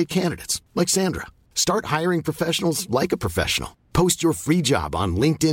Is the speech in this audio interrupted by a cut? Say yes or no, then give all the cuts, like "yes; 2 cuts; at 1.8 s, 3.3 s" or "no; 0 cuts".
no; 0 cuts